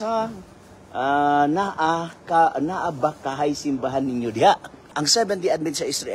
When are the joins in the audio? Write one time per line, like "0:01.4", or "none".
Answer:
0:04.9